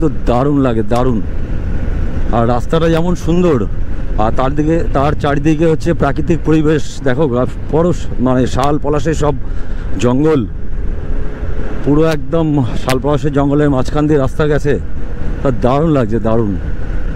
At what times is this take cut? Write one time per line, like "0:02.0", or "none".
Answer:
none